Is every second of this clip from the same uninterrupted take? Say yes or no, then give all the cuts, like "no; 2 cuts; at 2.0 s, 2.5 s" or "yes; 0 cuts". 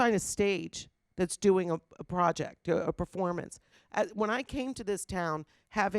no; 1 cut; at 3.7 s